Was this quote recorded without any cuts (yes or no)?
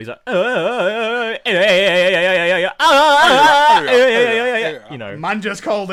yes